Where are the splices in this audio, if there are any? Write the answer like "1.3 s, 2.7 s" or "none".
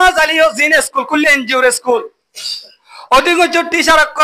none

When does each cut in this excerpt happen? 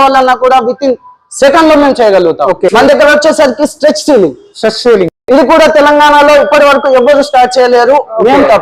none

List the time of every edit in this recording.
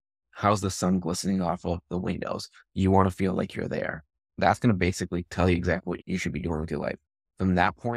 4.4 s

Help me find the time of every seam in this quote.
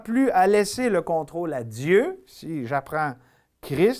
none

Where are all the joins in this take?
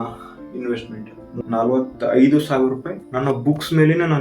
1.3 s

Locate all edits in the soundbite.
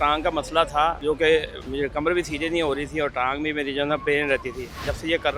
1.0 s

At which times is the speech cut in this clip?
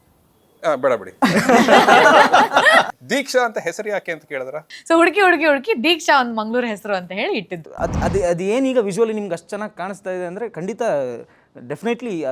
2.9 s, 4.7 s, 7.6 s

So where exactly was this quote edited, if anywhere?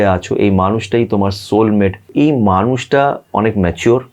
2.1 s

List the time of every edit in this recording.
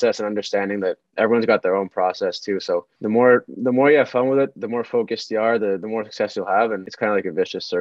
6.9 s

